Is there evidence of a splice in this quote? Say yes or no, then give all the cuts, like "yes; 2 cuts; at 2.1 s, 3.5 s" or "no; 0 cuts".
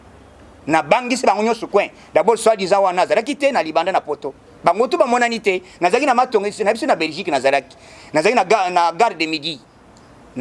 no; 0 cuts